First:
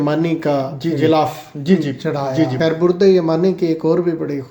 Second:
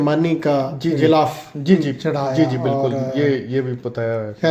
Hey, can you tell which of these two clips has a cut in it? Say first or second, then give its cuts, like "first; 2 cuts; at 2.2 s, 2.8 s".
first; 1 cut; at 2.5 s